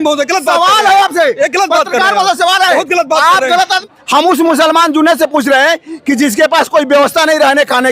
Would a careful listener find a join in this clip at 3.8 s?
yes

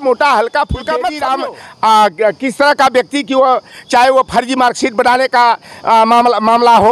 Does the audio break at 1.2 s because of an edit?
yes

